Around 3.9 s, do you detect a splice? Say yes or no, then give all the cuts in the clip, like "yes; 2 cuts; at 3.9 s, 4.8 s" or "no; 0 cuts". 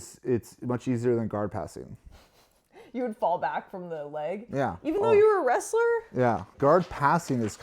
no; 1 cut; at 6.5 s